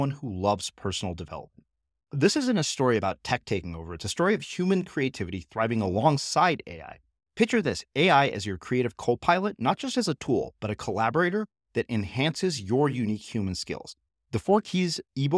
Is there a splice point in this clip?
no; 0 cuts

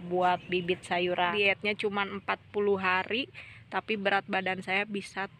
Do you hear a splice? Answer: yes; 1 cut; at 1.3 s

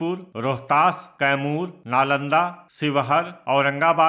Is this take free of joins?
no; 1 cut; at 1.8 s

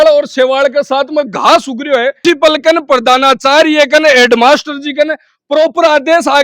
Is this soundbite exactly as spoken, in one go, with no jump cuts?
no; 1 cut; at 2.2 s

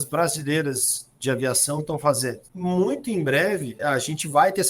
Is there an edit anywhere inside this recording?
yes; 2 cuts; at 2.5 s, 3.8 s

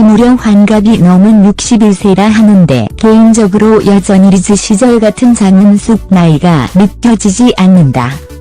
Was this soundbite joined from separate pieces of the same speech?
no; 0 cuts

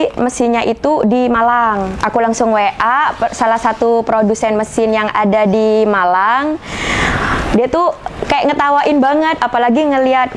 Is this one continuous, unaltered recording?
no; 1 cut; at 2.0 s

